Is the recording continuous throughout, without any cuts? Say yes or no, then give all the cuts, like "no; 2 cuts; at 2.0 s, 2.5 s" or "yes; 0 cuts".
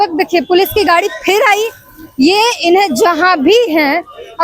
yes; 0 cuts